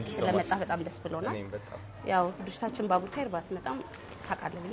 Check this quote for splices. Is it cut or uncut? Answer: uncut